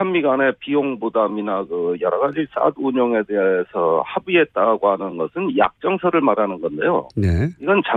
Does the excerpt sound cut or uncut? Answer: uncut